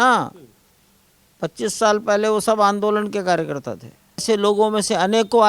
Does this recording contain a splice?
yes; 1 cut; at 4.2 s

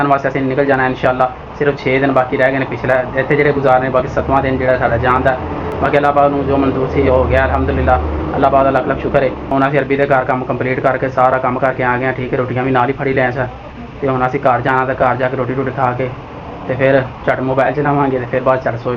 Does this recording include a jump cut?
no; 0 cuts

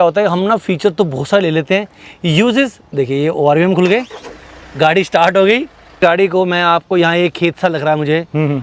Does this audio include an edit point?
yes; 1 cut; at 6.0 s

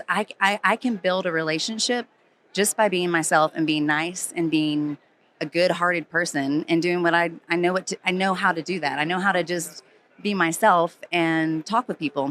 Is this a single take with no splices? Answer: yes; 0 cuts

